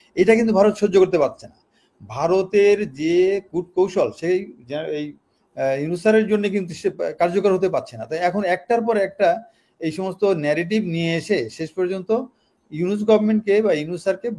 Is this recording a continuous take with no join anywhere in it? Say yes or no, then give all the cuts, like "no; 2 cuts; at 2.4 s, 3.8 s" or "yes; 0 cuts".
yes; 0 cuts